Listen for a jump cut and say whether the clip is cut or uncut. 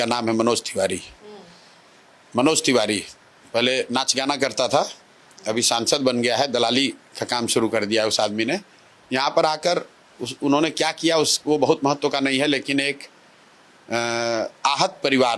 uncut